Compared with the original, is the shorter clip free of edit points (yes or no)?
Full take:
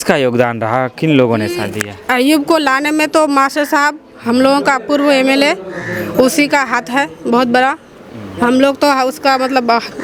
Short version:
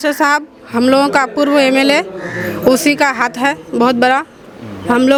yes